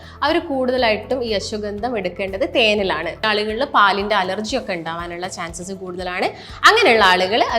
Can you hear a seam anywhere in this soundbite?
yes; 1 cut; at 3.2 s

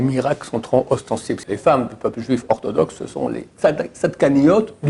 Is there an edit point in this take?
yes; 1 cut; at 1.4 s

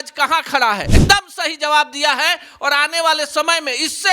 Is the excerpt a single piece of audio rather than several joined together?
no; 1 cut; at 0.9 s

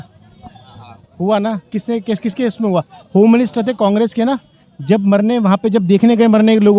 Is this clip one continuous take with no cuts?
yes; 0 cuts

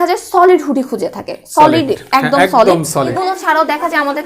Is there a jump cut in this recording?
yes; 1 cut; at 3.1 s

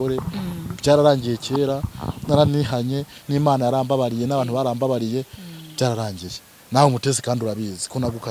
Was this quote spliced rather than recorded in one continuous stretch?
no; 0 cuts

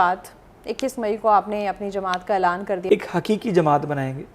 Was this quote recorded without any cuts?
no; 1 cut; at 2.8 s

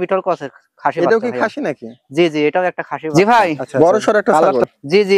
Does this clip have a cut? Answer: yes; 1 cut; at 3.0 s

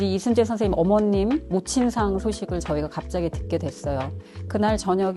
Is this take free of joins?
yes; 0 cuts

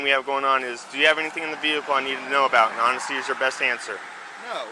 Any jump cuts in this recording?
no; 0 cuts

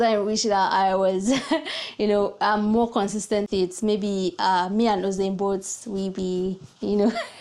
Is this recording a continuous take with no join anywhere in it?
yes; 0 cuts

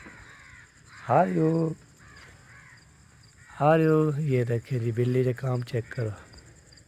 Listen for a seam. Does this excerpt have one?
no; 0 cuts

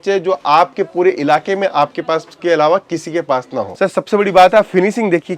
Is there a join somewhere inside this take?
yes; 1 cut; at 3.6 s

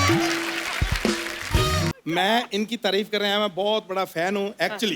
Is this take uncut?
no; 1 cut; at 1.9 s

